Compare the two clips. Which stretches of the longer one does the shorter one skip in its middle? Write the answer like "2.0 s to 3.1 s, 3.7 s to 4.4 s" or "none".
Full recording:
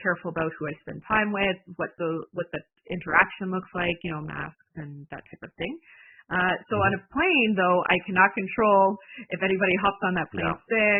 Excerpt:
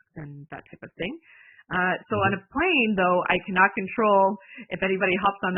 none